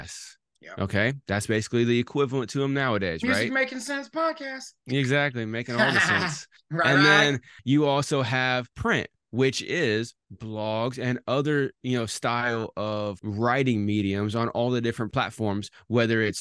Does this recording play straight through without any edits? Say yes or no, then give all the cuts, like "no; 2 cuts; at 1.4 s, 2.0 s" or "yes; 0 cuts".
no; 4 cuts; at 7.5 s, 8.7 s, 13.2 s, 15.1 s